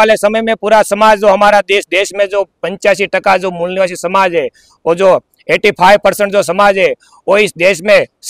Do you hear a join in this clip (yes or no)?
no